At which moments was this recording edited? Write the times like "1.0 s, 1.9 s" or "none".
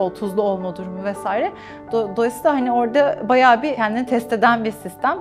3.7 s